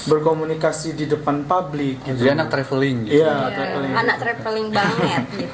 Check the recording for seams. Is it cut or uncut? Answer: uncut